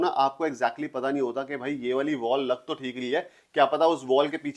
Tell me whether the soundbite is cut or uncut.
uncut